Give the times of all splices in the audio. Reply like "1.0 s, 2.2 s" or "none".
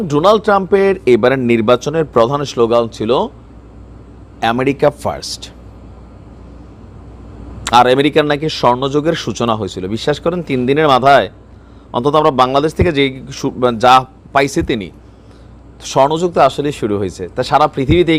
none